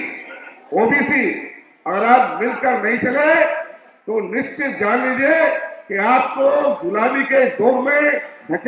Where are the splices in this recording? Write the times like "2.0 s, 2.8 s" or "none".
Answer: none